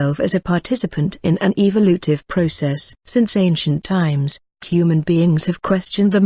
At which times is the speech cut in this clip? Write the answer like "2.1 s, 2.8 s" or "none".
2.2 s